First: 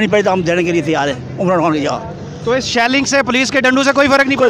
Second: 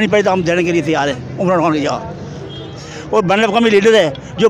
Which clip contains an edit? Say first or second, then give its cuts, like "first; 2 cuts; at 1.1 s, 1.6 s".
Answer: second; 1 cut; at 2.3 s